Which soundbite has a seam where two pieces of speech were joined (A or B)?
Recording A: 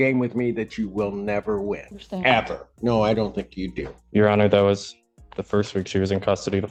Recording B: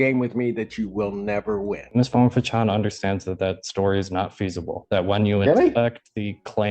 B